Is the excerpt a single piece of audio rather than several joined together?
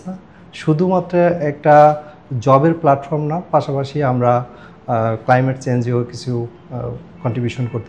yes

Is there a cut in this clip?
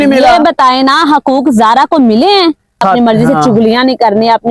yes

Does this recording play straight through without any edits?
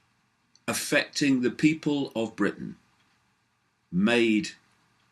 no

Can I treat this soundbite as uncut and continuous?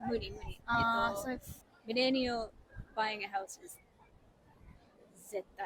yes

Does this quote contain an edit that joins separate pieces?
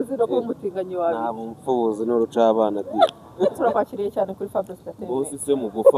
yes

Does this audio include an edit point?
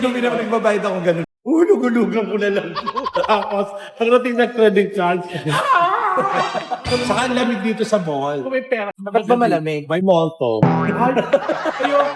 yes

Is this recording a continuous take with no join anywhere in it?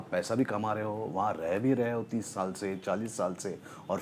yes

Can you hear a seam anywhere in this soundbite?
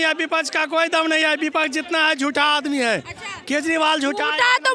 no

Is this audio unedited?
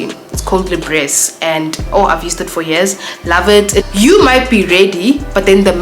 no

